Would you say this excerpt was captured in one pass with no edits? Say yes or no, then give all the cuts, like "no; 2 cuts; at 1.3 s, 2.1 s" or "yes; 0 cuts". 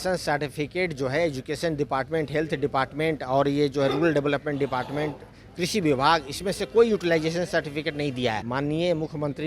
no; 1 cut; at 8.4 s